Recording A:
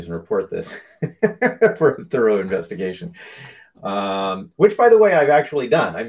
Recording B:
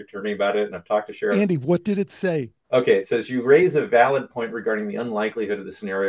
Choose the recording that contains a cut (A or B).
B